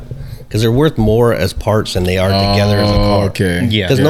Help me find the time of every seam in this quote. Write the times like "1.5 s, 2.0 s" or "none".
none